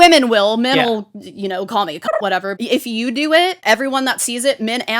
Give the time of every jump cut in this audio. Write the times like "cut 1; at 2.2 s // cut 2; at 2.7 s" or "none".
cut 1; at 2.5 s // cut 2; at 3.6 s